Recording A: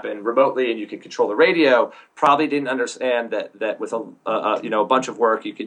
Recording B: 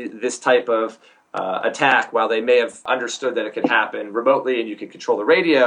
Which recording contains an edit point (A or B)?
B